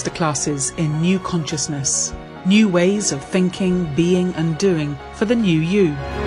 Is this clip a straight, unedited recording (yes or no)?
yes